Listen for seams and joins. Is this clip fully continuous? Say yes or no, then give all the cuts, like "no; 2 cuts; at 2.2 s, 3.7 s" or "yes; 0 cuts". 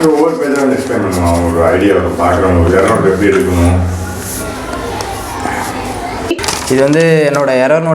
no; 1 cut; at 6.4 s